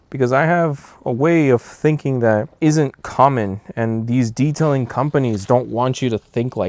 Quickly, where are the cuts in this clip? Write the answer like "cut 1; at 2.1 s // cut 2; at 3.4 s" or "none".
cut 1; at 2.5 s